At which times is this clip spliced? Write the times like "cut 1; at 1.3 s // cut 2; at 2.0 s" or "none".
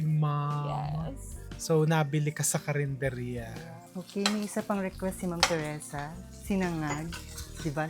cut 1; at 4.0 s